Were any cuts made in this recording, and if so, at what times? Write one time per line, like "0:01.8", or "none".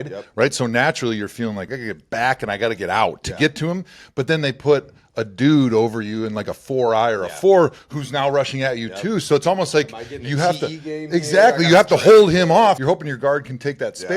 0:01.7
0:12.8